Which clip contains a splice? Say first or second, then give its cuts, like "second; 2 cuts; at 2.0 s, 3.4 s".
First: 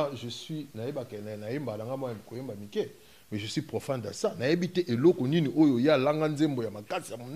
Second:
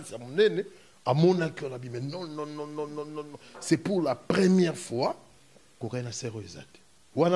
second; 1 cut; at 5.8 s